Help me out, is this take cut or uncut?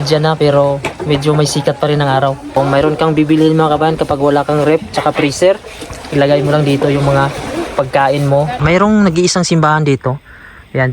cut